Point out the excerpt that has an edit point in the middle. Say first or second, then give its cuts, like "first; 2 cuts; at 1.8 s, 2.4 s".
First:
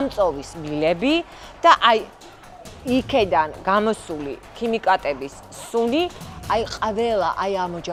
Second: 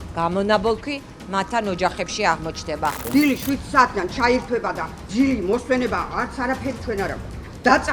second; 2 cuts; at 3.0 s, 4.9 s